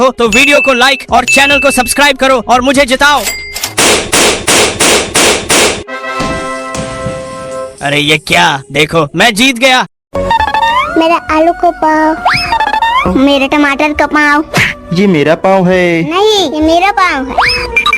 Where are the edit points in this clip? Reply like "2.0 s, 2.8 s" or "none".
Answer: 10.0 s